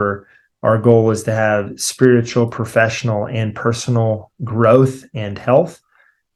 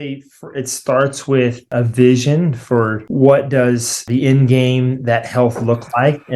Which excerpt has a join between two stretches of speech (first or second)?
second